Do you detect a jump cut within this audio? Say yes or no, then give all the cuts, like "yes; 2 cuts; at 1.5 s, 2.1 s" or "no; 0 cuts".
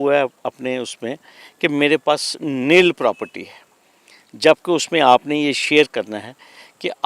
no; 0 cuts